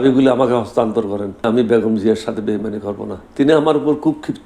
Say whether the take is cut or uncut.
cut